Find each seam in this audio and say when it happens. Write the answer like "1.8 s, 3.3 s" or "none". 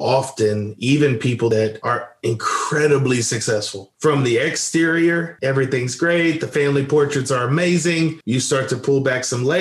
1.5 s